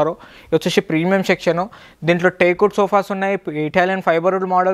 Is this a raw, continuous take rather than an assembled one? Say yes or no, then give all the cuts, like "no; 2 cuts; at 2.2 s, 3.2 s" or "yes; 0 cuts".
yes; 0 cuts